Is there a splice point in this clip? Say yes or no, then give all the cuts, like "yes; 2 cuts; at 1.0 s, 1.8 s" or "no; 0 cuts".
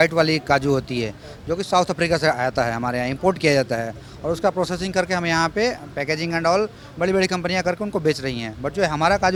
no; 0 cuts